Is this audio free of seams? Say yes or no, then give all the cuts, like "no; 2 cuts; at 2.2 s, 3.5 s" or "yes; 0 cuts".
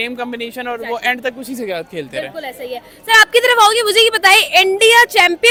yes; 0 cuts